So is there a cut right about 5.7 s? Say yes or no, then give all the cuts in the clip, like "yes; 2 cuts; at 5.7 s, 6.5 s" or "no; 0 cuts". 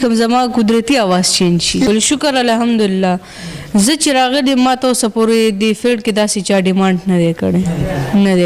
no; 1 cut; at 1.9 s